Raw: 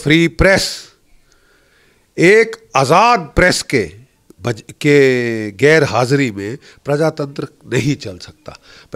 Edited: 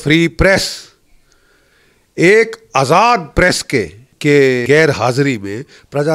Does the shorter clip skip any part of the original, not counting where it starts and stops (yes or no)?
yes